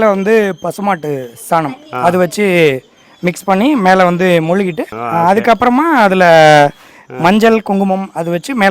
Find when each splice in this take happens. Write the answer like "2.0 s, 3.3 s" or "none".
4.9 s